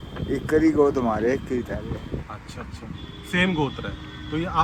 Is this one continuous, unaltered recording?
yes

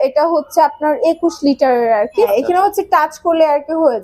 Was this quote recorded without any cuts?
no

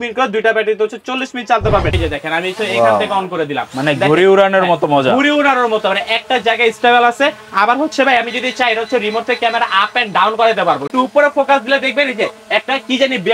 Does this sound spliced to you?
yes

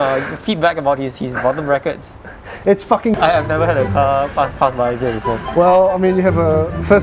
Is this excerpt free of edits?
no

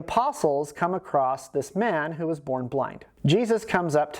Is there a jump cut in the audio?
yes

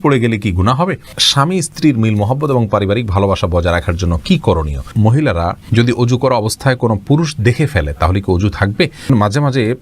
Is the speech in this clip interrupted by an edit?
yes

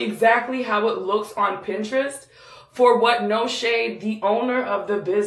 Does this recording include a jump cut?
no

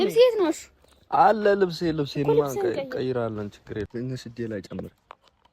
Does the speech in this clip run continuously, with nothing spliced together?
no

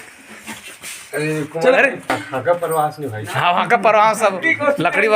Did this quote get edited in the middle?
yes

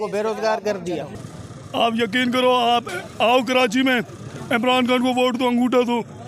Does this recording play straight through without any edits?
no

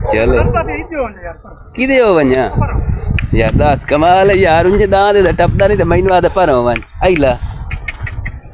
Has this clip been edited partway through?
no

